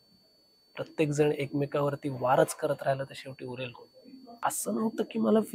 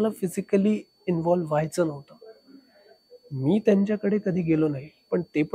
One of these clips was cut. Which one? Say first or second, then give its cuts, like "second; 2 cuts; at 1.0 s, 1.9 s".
first; 1 cut; at 4.4 s